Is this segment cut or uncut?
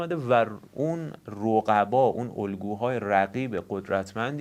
uncut